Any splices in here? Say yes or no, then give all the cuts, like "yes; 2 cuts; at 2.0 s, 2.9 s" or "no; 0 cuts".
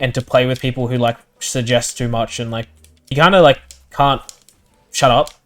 yes; 1 cut; at 3.0 s